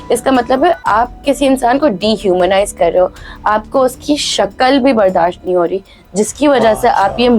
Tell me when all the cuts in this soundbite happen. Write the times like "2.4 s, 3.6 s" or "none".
none